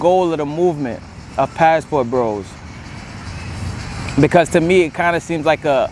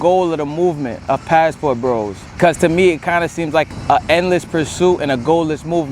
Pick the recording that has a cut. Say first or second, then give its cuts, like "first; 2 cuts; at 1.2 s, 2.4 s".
second; 3 cuts; at 0.9 s, 2.4 s, 3.7 s